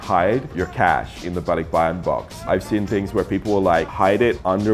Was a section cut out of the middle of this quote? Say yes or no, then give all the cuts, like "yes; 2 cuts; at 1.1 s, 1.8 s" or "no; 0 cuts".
no; 0 cuts